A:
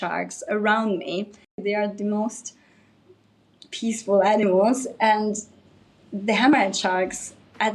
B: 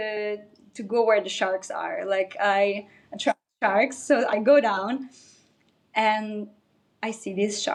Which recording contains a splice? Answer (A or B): A